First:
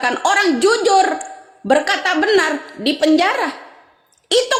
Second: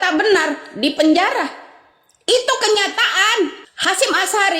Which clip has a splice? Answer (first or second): second